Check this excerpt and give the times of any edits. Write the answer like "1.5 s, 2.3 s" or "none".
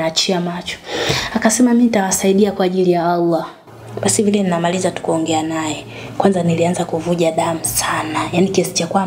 3.6 s